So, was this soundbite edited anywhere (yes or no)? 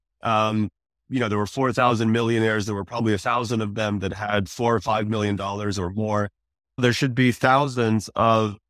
yes